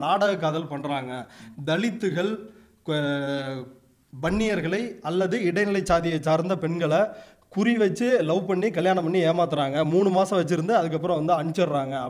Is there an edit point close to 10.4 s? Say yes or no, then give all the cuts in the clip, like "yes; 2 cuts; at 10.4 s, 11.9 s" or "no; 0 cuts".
no; 0 cuts